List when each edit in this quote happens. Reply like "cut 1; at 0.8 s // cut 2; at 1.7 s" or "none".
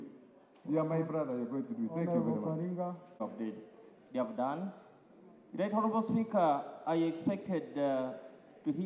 cut 1; at 3.2 s